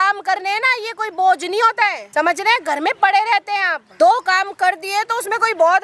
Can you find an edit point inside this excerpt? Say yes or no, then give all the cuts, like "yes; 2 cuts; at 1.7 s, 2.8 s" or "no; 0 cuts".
yes; 2 cuts; at 2.0 s, 3.8 s